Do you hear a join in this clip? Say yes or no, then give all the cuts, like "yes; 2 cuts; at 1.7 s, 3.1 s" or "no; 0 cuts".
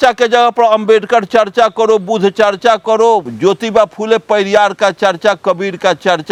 no; 0 cuts